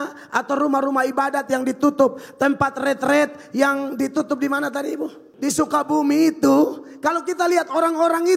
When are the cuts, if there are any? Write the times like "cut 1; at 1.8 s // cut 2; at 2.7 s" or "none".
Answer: cut 1; at 5.2 s